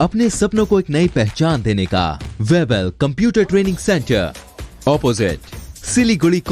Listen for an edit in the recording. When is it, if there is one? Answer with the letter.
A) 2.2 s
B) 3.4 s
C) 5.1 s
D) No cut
A